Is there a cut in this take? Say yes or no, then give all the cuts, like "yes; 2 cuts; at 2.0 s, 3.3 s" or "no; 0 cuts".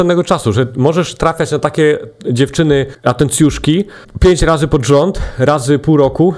yes; 2 cuts; at 2.9 s, 4.0 s